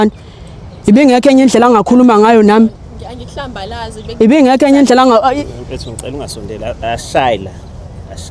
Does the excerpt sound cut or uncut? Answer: uncut